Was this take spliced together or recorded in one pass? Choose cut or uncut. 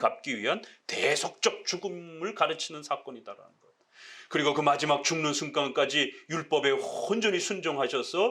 uncut